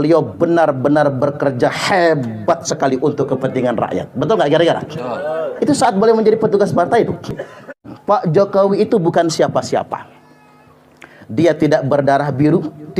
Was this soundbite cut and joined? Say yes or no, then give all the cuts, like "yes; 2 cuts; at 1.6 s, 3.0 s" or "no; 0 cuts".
yes; 1 cut; at 7.9 s